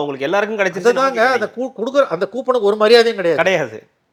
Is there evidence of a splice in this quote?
no; 0 cuts

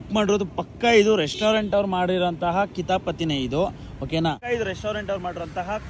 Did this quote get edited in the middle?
yes; 1 cut; at 4.4 s

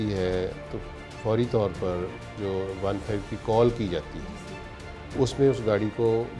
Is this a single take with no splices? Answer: yes; 0 cuts

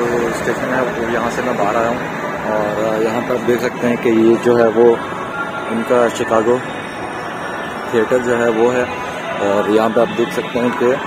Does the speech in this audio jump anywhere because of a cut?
no; 0 cuts

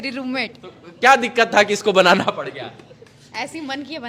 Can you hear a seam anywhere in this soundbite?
no; 0 cuts

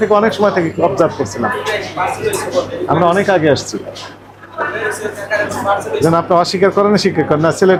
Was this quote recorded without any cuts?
yes; 0 cuts

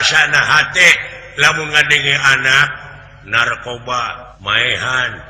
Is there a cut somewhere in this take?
yes; 1 cut; at 4.3 s

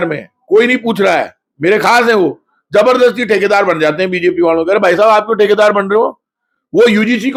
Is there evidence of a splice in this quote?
no; 0 cuts

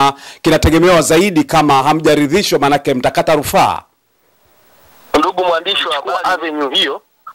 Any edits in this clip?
yes; 1 cut; at 6.0 s

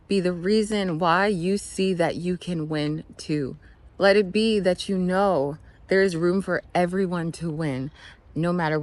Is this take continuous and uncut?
yes; 0 cuts

